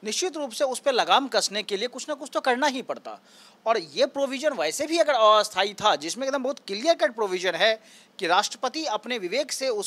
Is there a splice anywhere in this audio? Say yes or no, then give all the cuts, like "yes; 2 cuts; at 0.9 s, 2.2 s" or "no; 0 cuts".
no; 0 cuts